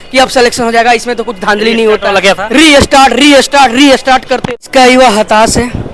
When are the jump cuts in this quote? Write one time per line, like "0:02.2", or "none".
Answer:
0:04.6